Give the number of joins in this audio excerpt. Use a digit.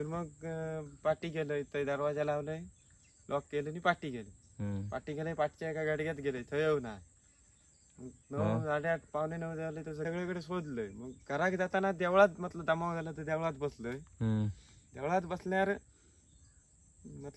1